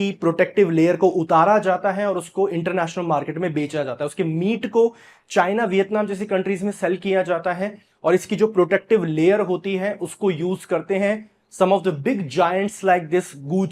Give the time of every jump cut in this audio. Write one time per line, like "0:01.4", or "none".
none